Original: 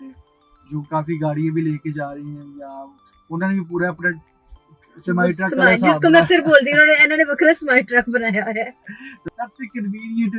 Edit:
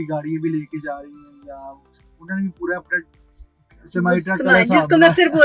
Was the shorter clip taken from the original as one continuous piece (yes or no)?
yes